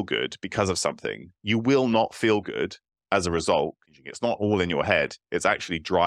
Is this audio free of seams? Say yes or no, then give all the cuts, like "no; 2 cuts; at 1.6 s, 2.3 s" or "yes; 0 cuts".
no; 1 cut; at 4.0 s